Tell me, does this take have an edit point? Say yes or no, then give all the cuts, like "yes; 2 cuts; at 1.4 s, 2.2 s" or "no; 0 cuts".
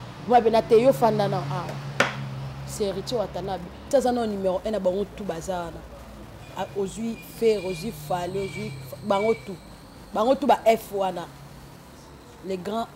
yes; 1 cut; at 3.8 s